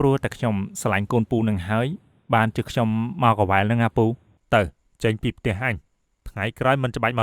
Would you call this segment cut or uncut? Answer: cut